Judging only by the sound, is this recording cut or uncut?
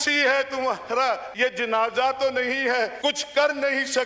cut